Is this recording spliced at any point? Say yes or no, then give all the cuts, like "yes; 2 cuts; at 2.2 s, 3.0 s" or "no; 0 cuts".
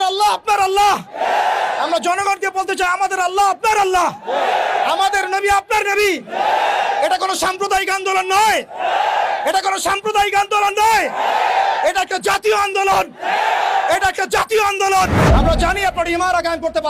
yes; 1 cut; at 15.2 s